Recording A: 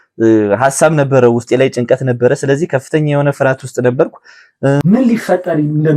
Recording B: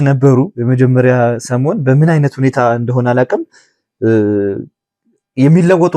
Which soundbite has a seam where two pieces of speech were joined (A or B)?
A